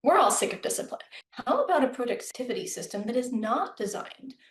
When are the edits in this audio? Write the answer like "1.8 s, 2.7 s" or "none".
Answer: 1.1 s, 2.3 s